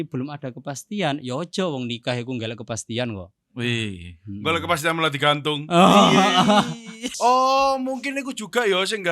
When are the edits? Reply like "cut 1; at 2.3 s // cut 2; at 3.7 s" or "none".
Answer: cut 1; at 7.1 s